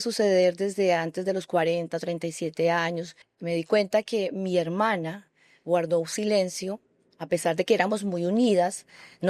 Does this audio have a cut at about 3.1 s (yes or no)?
yes